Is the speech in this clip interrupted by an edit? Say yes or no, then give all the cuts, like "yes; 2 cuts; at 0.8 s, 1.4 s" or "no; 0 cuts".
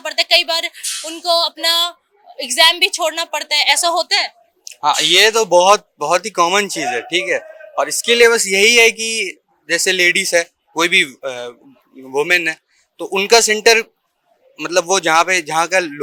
no; 0 cuts